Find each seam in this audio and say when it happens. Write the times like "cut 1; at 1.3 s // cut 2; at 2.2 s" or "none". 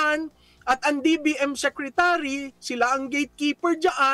none